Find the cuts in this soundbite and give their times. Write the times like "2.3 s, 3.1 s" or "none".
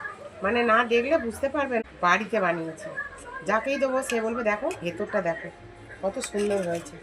1.8 s